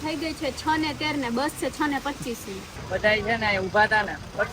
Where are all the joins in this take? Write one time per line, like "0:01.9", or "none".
0:02.8

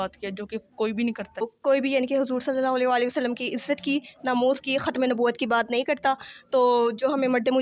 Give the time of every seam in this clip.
0:01.5

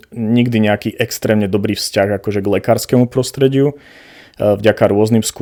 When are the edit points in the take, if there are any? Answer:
none

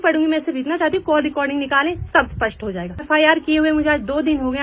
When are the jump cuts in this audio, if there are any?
0:03.0

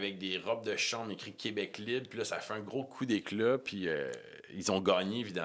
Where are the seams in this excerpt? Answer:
none

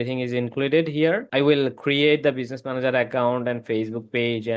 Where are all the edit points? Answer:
0:01.3

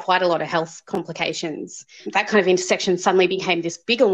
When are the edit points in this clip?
0:02.0

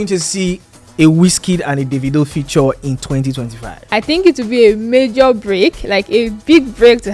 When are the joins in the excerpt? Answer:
0:03.8

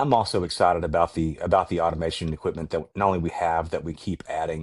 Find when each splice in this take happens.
none

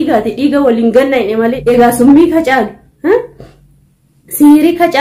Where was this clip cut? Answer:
0:01.6

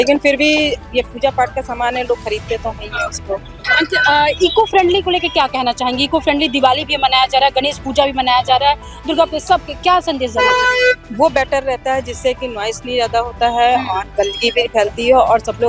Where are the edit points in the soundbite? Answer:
none

